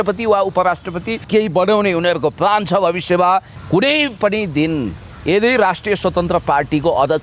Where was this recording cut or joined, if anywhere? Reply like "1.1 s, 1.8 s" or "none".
1.2 s, 3.6 s